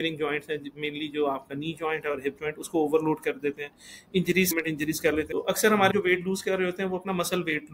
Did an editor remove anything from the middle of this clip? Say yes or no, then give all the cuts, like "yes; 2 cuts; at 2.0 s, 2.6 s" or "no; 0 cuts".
yes; 1 cut; at 5.3 s